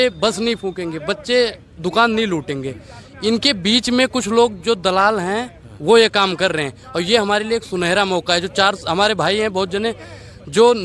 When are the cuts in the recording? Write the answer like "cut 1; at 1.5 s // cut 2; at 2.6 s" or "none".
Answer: none

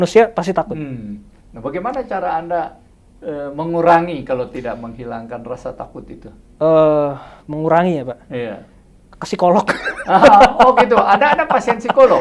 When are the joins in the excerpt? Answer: none

